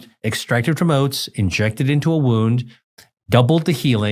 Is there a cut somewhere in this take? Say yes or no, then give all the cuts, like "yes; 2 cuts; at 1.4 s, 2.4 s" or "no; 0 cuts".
no; 0 cuts